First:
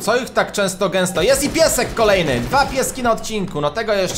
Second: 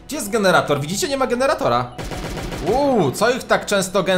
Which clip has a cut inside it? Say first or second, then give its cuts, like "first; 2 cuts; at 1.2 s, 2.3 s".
second; 1 cut; at 2.0 s